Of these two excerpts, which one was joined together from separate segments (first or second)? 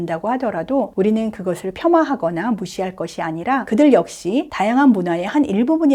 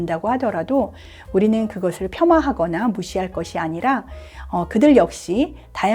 first